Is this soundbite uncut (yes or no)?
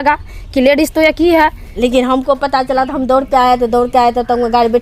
no